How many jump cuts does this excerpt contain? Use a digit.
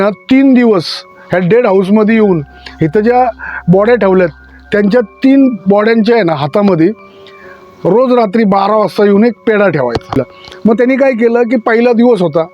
1